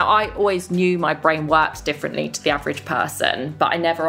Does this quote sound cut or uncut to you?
uncut